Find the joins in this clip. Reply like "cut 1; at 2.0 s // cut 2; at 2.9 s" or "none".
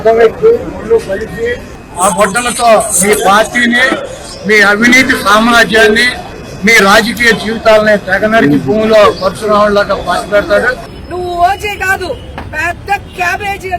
cut 1; at 12.3 s